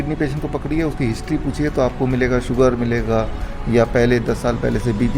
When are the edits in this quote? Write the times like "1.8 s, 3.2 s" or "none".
none